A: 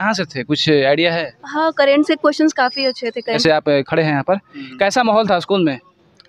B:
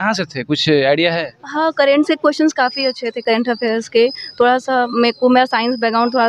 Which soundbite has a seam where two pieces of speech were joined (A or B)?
A